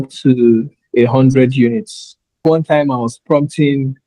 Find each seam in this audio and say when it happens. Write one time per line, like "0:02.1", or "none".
0:02.4